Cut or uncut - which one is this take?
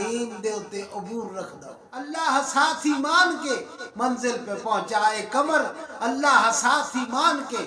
cut